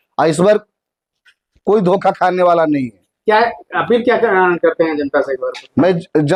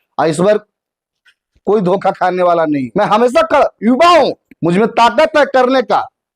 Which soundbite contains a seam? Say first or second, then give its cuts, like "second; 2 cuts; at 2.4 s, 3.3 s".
second; 1 cut; at 2.9 s